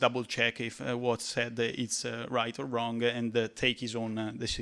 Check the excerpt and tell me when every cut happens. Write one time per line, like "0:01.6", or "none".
none